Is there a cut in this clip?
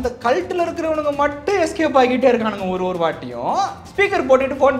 no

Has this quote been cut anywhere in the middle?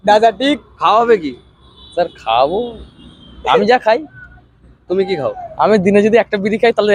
no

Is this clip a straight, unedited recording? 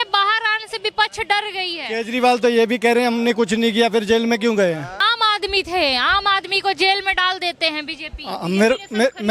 no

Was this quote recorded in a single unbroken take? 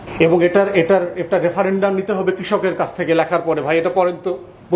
yes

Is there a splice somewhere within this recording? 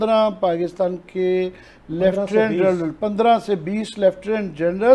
no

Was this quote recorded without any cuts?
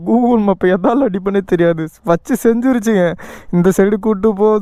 yes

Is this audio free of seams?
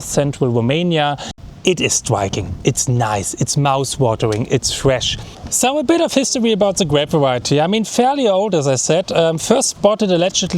no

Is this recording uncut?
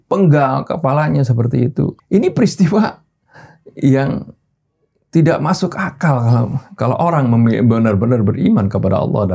no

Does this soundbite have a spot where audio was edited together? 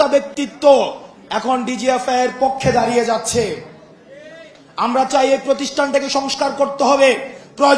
no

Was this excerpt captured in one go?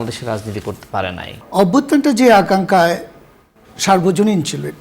no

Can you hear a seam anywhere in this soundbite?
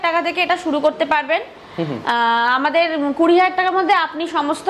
no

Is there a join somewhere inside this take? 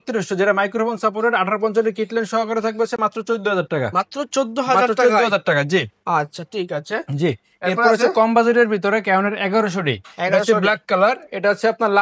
no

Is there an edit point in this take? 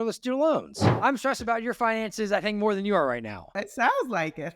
yes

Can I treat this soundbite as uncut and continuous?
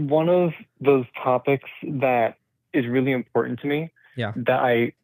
yes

